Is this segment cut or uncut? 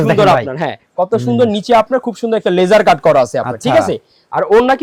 uncut